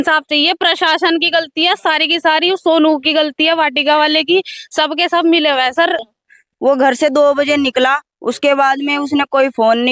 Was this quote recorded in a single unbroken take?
no; 1 cut; at 6.0 s

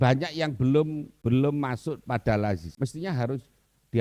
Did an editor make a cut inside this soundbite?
yes; 2 cuts; at 1.1 s, 2.7 s

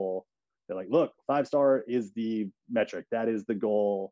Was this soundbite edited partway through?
no; 0 cuts

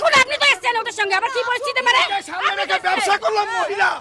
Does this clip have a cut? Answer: no; 0 cuts

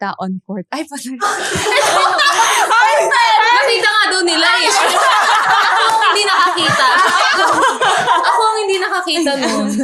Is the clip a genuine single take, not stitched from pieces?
yes; 0 cuts

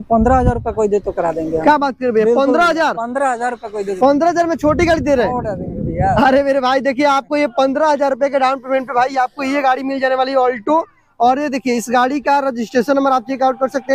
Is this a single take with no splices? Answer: yes; 0 cuts

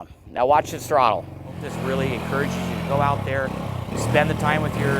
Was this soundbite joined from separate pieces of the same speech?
yes; 1 cut; at 1.7 s

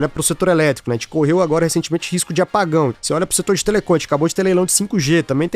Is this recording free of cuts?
no; 1 cut; at 3.0 s

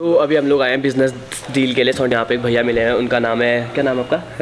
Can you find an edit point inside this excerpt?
yes; 1 cut; at 2.1 s

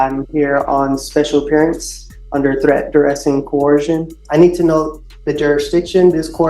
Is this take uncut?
no; 1 cut; at 4.2 s

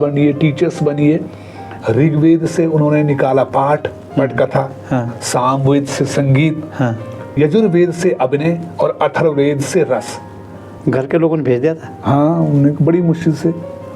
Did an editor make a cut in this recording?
yes; 3 cuts; at 1.7 s, 7.4 s, 10.8 s

